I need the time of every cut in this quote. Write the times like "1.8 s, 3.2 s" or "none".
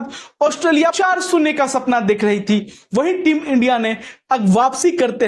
none